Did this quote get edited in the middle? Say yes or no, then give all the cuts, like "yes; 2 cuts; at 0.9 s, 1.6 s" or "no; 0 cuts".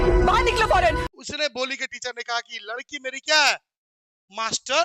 yes; 1 cut; at 1.1 s